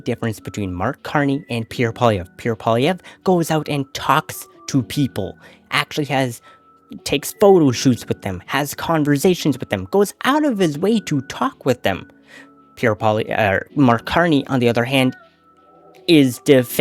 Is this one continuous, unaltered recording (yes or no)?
yes